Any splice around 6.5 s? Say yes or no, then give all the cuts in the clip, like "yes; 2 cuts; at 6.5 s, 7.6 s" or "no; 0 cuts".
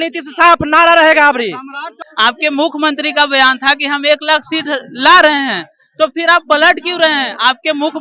no; 1 cut; at 2.0 s